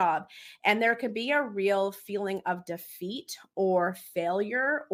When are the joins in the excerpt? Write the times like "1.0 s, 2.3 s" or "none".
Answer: none